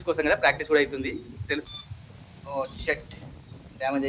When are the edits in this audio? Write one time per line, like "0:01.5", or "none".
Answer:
0:01.7